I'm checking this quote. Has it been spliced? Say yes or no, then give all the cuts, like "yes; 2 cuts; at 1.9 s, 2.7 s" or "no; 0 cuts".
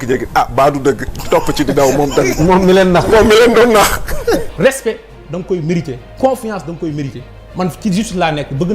yes; 1 cut; at 4.5 s